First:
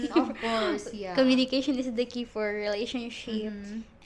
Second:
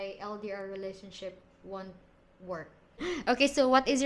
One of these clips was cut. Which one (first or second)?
second